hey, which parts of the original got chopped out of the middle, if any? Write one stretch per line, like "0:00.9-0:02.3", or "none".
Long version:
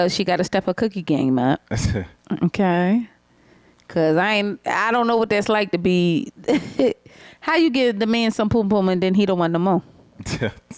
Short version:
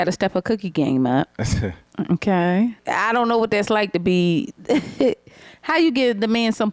0:03.1-0:04.6